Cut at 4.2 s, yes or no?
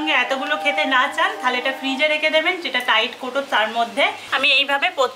yes